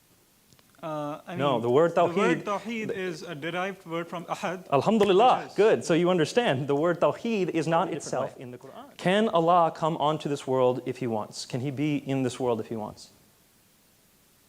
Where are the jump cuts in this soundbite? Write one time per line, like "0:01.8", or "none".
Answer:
0:09.2